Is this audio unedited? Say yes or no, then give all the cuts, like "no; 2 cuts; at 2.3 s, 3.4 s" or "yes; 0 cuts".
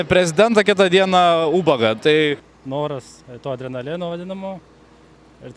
no; 1 cut; at 2.4 s